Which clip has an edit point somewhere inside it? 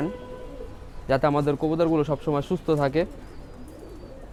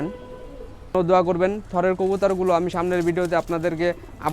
second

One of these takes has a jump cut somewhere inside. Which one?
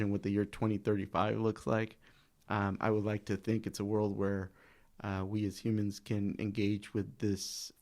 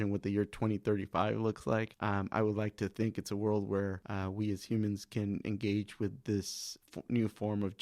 second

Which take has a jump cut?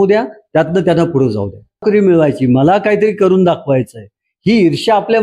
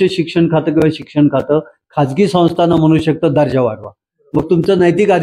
first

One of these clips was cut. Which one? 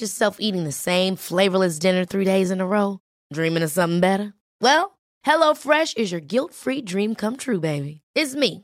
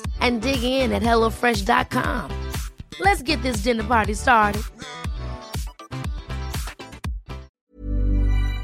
second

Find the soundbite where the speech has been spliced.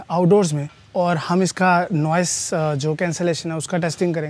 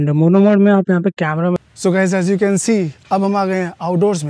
second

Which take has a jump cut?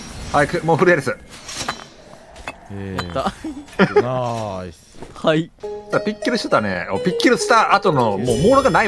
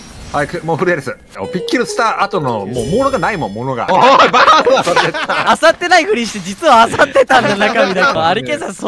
second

